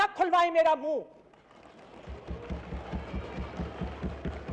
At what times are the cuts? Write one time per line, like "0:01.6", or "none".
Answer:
none